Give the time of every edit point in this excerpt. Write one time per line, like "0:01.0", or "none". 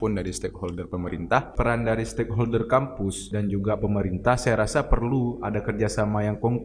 0:01.5
0:03.2